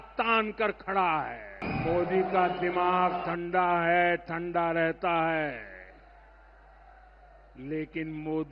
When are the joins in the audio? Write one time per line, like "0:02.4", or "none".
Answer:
0:01.6